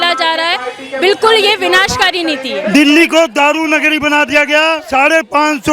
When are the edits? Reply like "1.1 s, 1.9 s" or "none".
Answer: 2.5 s, 4.8 s